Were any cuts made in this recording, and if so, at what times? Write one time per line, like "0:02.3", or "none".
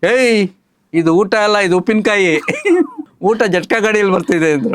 0:03.0